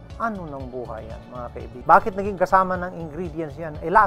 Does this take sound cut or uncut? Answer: cut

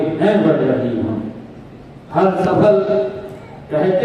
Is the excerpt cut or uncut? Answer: uncut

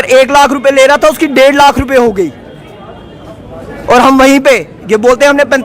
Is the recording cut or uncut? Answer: uncut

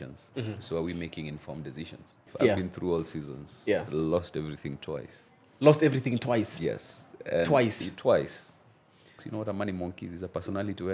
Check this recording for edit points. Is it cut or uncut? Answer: cut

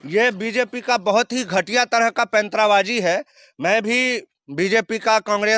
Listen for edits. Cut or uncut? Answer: uncut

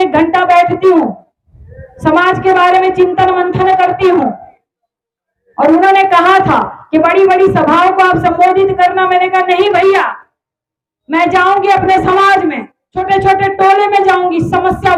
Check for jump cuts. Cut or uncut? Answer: uncut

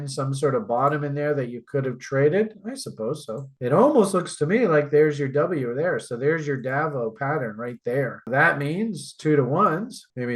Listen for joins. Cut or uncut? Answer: cut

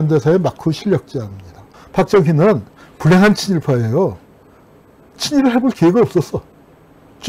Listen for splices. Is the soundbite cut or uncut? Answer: cut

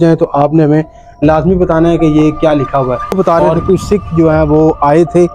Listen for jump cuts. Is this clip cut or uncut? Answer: cut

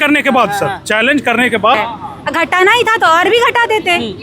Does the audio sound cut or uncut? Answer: cut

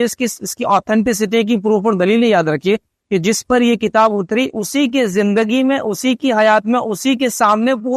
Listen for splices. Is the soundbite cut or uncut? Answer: uncut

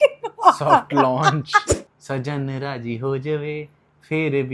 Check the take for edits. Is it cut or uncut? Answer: cut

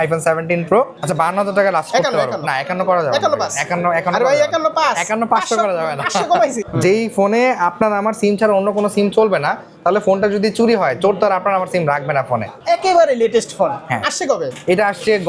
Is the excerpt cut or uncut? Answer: cut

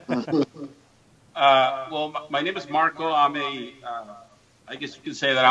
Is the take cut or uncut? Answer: cut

